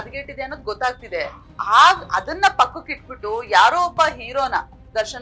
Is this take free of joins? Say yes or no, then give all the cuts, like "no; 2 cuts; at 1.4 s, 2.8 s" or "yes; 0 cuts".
yes; 0 cuts